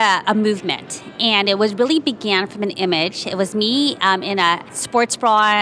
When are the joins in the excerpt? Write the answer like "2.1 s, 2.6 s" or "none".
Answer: none